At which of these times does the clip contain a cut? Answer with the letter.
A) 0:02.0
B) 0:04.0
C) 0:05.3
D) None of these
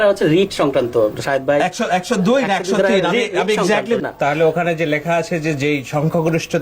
B